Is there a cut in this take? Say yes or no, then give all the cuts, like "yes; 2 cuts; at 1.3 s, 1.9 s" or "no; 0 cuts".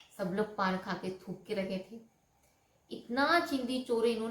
no; 0 cuts